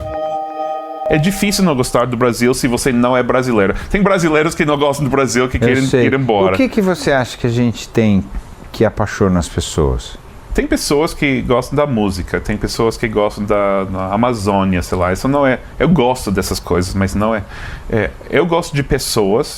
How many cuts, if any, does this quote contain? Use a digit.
2